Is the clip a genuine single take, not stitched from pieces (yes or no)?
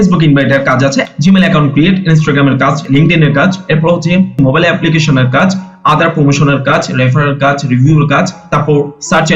no